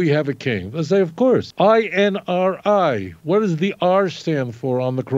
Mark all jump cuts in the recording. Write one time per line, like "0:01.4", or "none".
0:01.5